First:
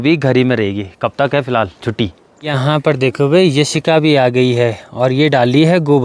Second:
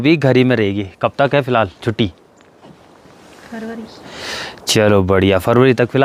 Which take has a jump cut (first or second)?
first